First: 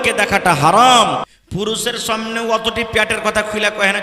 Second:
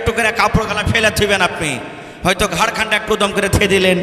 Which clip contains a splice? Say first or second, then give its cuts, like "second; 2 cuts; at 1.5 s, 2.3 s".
first; 1 cut; at 1.3 s